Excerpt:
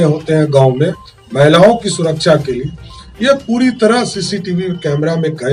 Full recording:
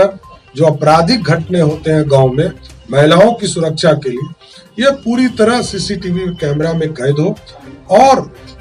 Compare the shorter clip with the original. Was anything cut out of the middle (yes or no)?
no